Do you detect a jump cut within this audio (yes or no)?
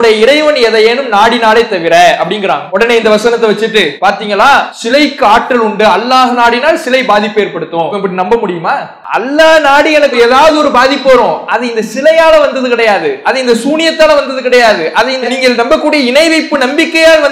yes